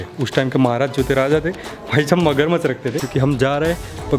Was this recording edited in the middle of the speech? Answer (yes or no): yes